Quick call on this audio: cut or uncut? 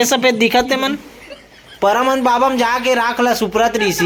uncut